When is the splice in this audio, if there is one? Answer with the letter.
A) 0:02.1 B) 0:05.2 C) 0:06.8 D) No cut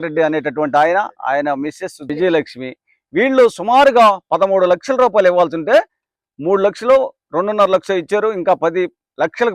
A